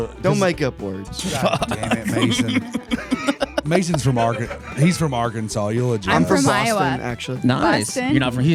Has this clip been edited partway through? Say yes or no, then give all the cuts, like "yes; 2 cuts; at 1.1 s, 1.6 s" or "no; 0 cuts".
no; 0 cuts